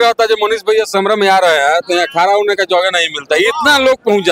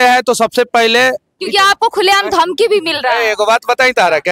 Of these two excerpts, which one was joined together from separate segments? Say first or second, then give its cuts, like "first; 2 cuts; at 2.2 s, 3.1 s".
second; 1 cut; at 1.3 s